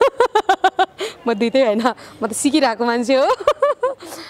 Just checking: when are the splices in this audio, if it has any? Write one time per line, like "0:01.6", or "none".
none

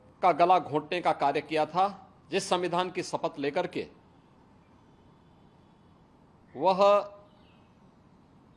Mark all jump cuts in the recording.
0:02.1

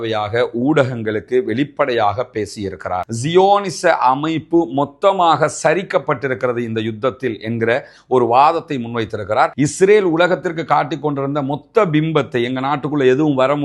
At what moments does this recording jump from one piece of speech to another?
0:03.0
0:09.6

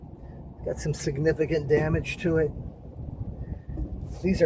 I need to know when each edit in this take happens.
none

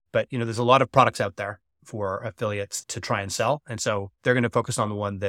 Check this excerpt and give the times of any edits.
0:02.8
0:04.1

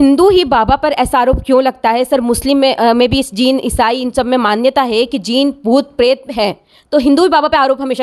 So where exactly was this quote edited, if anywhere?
none

